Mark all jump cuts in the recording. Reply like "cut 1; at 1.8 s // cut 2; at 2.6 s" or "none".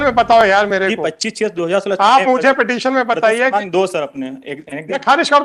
none